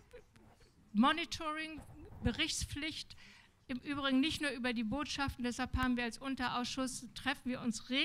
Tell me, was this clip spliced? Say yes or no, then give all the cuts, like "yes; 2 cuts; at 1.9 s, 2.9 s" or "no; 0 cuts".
no; 0 cuts